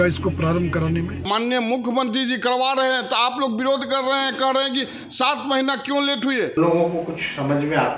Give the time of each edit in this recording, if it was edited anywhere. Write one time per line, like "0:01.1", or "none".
0:01.2
0:06.6